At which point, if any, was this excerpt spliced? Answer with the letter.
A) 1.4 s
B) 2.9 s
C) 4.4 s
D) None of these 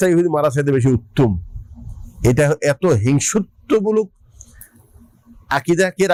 D